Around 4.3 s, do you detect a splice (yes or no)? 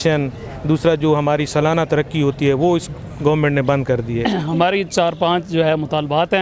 yes